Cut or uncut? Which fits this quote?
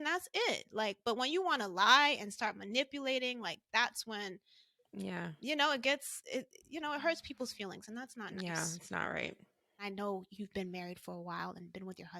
uncut